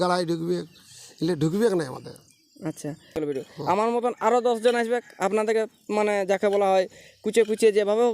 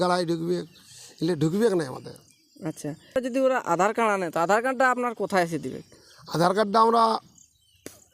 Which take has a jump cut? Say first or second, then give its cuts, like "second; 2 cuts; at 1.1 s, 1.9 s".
first; 1 cut; at 3.1 s